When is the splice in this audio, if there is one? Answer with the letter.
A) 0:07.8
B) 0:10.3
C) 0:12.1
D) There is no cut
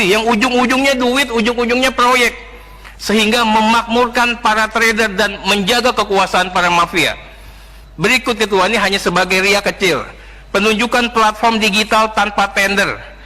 D